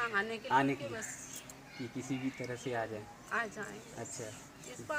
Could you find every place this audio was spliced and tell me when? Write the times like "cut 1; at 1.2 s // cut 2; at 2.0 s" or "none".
none